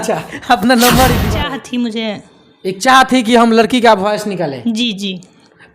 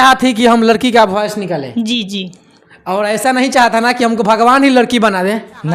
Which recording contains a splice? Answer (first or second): first